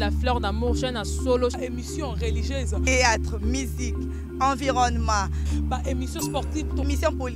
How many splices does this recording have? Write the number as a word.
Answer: zero